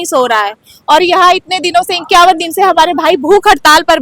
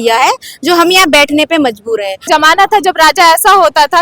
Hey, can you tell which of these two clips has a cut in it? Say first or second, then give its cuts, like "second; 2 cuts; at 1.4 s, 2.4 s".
second; 1 cut; at 2.2 s